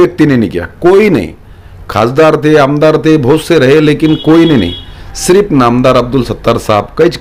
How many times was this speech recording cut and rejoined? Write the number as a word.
zero